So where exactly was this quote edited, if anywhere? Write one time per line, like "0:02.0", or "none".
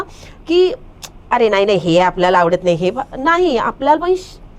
none